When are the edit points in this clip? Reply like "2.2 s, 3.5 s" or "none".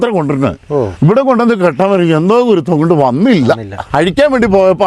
0.9 s, 3.8 s